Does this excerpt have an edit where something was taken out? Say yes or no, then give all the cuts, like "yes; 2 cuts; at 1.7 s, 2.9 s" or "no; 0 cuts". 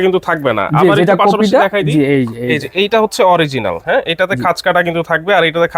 no; 0 cuts